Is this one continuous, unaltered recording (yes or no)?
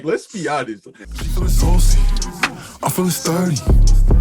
no